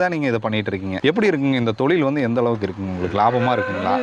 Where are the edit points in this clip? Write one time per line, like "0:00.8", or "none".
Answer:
0:01.0

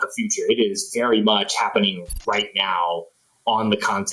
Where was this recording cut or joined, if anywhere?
none

